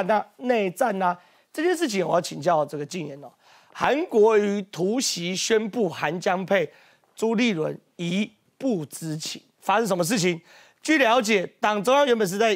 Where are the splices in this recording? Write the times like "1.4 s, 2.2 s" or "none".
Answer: none